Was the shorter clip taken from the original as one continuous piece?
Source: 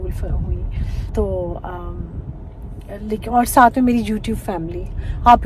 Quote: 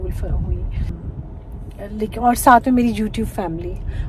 no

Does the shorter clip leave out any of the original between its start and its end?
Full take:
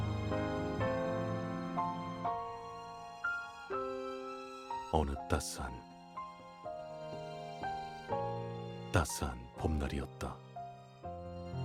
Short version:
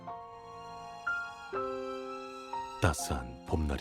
yes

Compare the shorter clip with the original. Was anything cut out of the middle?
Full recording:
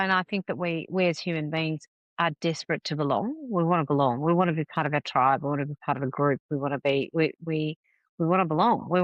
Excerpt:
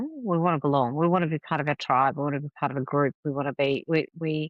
no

